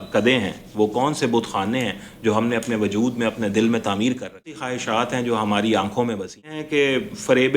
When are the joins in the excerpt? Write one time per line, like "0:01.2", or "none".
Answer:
0:04.7
0:06.6